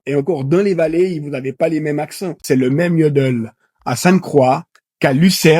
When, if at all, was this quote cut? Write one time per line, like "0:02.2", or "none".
0:02.3